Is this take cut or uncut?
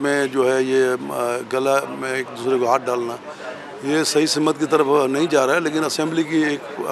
uncut